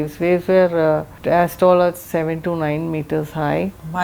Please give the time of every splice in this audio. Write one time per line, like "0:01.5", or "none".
0:01.1